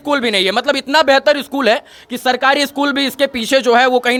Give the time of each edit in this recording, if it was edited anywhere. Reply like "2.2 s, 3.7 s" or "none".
none